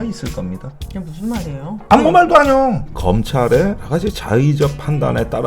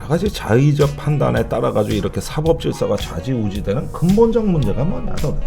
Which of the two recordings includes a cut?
first; 1 cut; at 2.8 s

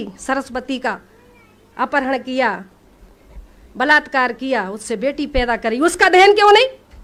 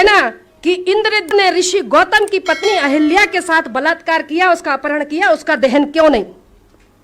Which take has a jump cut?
second; 1 cut; at 1.3 s

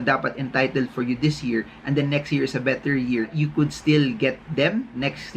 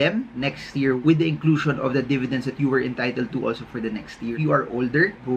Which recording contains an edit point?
second; 1 cut; at 4.4 s

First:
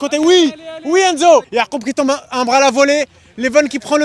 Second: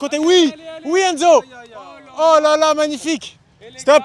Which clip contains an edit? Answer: first; 1 cut; at 1.5 s

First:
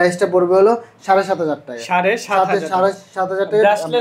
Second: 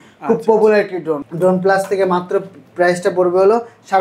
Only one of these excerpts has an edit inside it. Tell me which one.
second; 1 cut; at 1.3 s

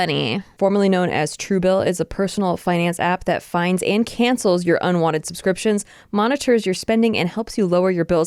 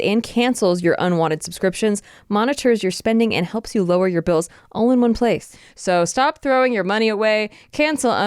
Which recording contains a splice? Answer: second; 1 cut; at 5.6 s

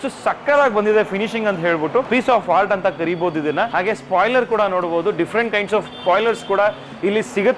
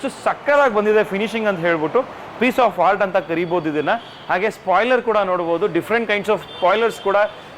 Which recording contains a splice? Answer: first; 2 cuts; at 2.1 s, 3.7 s

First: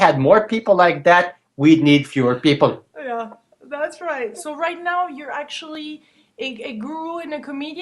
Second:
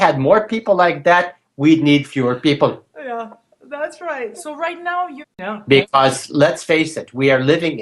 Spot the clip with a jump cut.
first; 1 cut; at 5.4 s

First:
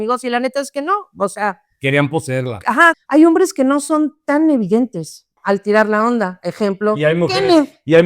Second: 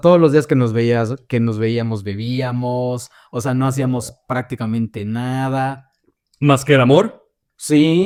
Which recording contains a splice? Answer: first; 2 cuts; at 3.0 s, 5.4 s

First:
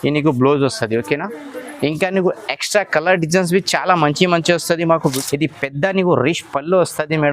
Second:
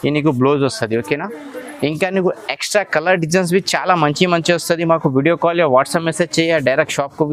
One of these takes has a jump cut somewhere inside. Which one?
first; 1 cut; at 5.2 s

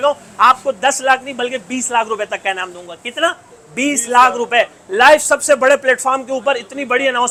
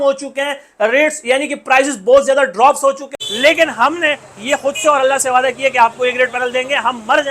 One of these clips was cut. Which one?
second; 1 cut; at 3.1 s

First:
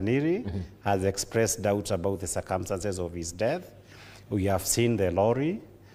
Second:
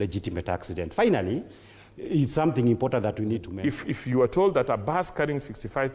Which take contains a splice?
second; 1 cut; at 3.6 s

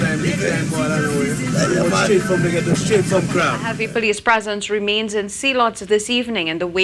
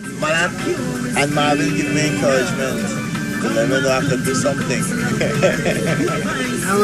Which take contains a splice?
first; 1 cut; at 3.6 s

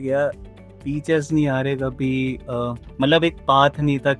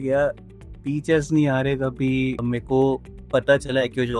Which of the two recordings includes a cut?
second; 2 cuts; at 2.4 s, 3.1 s

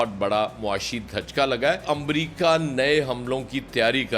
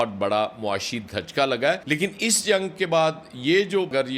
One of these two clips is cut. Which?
first; 1 cut; at 1.8 s

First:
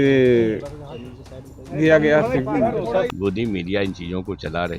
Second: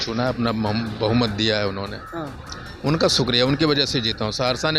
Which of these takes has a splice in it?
first; 1 cut; at 3.1 s

